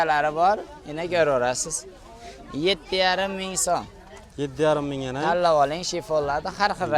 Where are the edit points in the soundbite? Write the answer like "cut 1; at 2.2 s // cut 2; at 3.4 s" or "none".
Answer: none